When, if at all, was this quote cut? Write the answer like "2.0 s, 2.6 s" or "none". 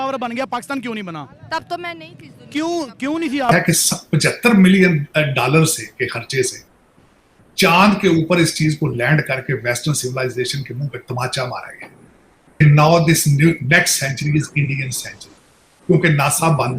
3.5 s, 12.6 s